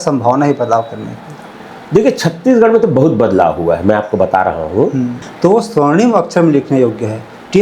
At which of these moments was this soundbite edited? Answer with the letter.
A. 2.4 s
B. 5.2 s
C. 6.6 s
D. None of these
B